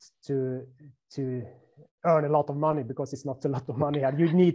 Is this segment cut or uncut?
uncut